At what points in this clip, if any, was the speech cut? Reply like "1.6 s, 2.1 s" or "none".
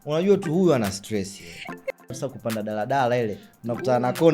1.9 s